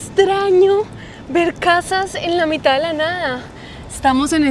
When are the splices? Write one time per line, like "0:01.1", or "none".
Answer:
none